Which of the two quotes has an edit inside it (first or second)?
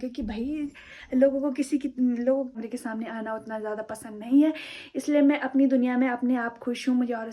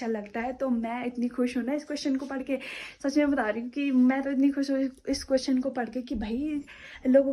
first